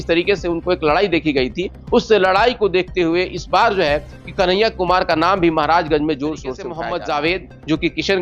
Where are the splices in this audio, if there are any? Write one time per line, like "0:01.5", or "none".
0:06.7